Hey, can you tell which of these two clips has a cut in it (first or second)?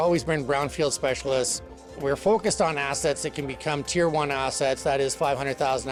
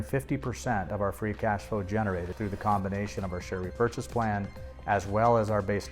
second